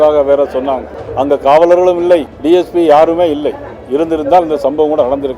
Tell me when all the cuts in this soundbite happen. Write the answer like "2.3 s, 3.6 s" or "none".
1.0 s, 2.3 s